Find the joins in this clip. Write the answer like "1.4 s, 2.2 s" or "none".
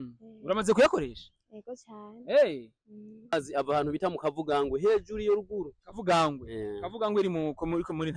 3.3 s